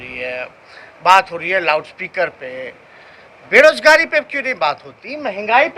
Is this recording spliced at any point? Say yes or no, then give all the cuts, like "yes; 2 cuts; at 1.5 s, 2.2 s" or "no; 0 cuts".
no; 0 cuts